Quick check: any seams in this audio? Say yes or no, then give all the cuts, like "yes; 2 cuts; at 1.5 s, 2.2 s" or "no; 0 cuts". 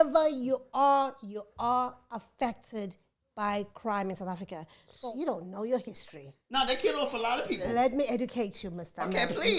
yes; 1 cut; at 5.1 s